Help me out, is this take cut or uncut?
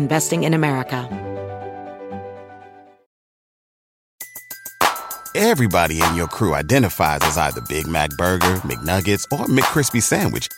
cut